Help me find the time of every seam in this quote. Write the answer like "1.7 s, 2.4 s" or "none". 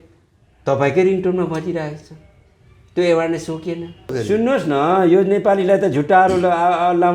4.2 s